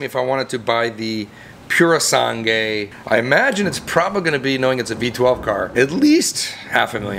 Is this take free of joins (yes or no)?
no